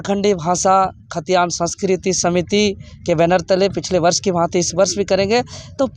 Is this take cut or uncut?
uncut